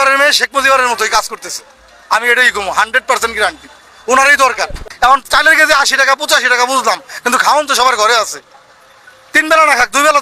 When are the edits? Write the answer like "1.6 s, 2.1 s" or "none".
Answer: none

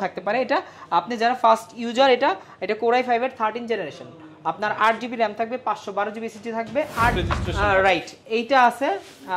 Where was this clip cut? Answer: 7.2 s

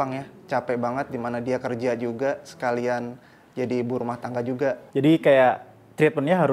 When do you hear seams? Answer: 4.9 s

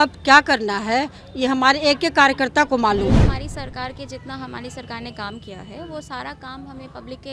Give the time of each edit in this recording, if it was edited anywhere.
3.2 s

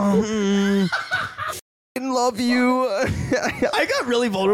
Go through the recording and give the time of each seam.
2.0 s, 3.7 s

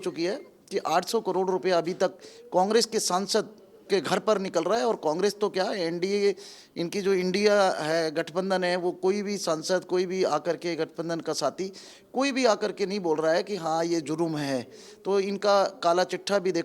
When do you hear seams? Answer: none

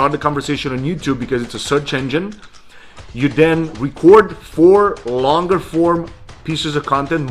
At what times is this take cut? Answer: 3.8 s

